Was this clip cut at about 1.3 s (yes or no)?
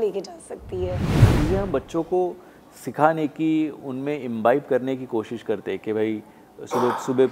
yes